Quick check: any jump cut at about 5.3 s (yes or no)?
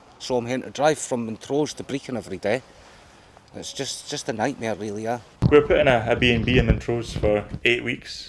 yes